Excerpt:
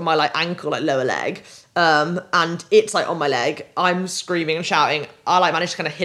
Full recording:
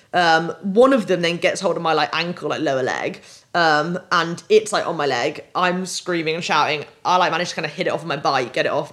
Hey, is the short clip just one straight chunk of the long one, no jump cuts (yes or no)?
yes